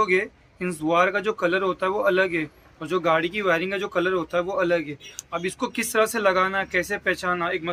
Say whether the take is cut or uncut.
uncut